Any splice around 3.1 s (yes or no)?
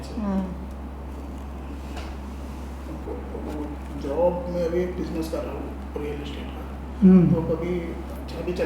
yes